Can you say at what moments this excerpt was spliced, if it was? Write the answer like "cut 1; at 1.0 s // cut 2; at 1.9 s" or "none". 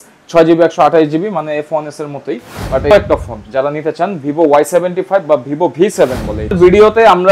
cut 1; at 2.9 s // cut 2; at 6.5 s